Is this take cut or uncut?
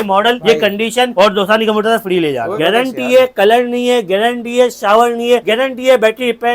cut